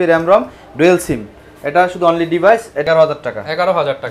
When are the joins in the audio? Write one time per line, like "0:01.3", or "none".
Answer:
0:02.9